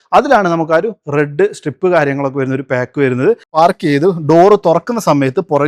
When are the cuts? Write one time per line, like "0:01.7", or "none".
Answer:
0:03.6